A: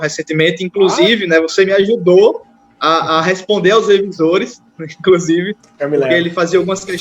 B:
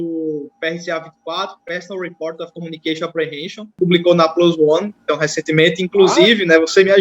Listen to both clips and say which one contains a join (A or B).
B